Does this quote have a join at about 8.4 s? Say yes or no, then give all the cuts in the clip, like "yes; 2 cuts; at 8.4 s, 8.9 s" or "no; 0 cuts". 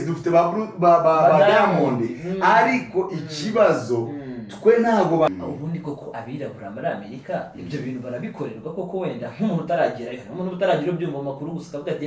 no; 1 cut; at 5.3 s